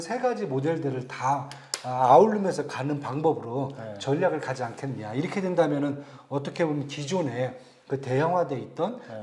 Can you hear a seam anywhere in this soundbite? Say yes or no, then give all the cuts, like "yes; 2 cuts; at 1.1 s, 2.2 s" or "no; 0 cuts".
no; 0 cuts